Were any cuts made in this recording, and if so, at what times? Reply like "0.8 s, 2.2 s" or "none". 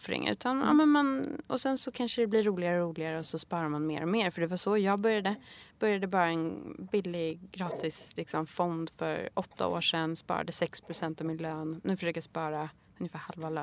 none